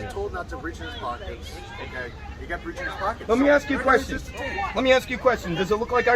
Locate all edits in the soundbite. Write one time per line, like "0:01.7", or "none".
none